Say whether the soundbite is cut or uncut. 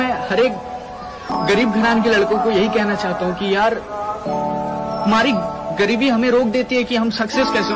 uncut